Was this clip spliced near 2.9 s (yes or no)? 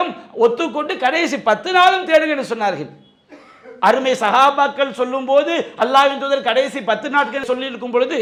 no